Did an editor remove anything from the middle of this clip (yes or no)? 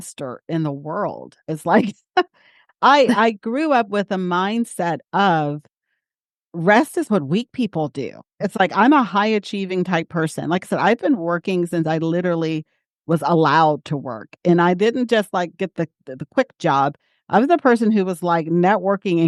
no